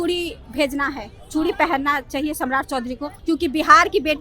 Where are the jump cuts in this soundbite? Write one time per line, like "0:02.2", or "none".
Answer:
0:03.1